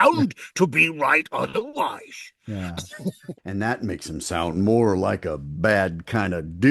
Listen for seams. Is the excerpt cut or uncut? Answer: cut